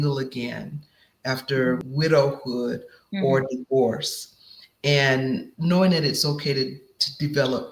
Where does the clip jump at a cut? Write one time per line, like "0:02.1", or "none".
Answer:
0:01.8
0:05.5